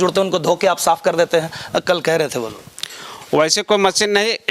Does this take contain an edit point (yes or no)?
no